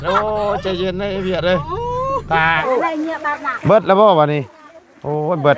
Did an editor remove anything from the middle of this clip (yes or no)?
yes